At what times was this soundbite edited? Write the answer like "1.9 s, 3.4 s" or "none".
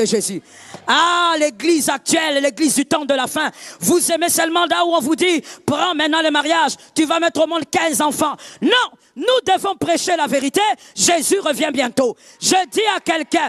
none